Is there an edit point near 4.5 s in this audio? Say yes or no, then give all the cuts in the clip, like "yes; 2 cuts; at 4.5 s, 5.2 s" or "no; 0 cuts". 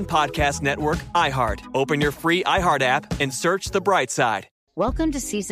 yes; 1 cut; at 4.5 s